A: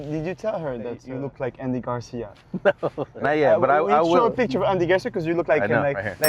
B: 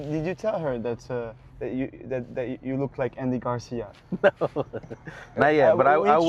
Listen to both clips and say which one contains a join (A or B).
A